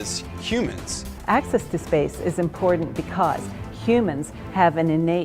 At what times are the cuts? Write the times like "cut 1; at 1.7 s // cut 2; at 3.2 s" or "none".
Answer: cut 1; at 3.0 s